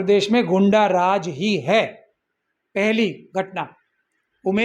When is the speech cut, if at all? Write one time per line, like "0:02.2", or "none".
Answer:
none